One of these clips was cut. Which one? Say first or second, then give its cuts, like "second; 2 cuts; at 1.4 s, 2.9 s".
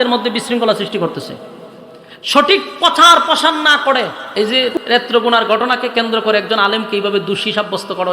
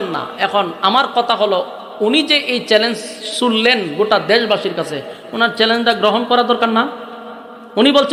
first; 1 cut; at 4.2 s